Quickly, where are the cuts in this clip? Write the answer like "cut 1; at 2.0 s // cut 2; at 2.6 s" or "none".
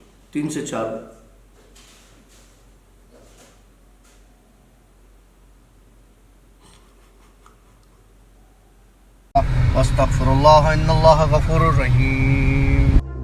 cut 1; at 9.2 s